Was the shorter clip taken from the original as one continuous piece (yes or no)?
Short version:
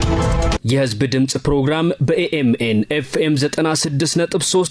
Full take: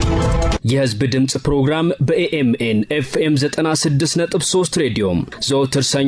yes